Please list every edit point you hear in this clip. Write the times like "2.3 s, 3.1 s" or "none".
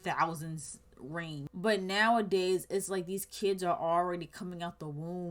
1.5 s

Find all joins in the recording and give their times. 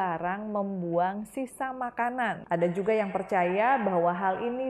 2.4 s

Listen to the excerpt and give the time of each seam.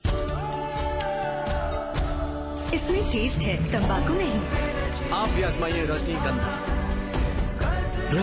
none

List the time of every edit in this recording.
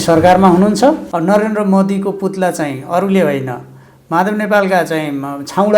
1.1 s

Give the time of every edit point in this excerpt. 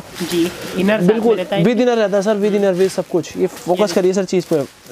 none

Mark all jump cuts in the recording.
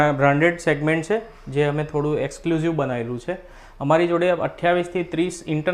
none

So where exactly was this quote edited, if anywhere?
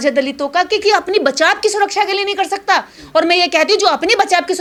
none

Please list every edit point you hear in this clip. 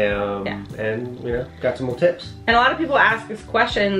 none

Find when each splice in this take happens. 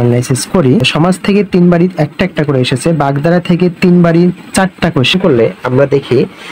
0.9 s, 5.1 s

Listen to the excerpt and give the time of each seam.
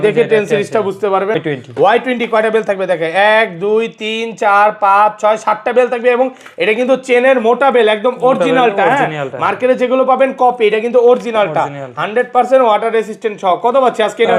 1.4 s

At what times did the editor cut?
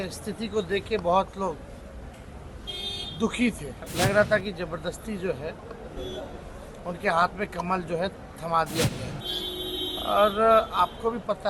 3.8 s, 9.1 s

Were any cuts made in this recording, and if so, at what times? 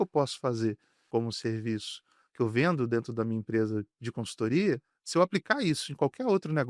1.0 s

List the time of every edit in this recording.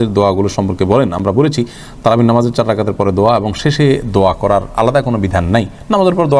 none

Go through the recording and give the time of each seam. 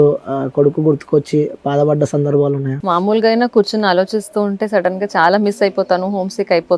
2.7 s

